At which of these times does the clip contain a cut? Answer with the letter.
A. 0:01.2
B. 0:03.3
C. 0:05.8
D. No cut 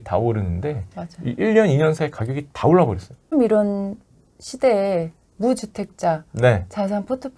B